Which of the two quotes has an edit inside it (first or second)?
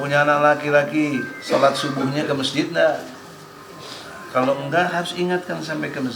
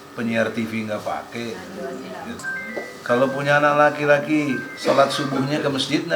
second